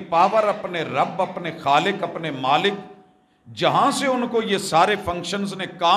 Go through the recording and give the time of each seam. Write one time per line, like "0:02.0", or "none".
none